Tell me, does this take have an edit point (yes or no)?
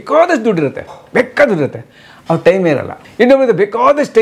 yes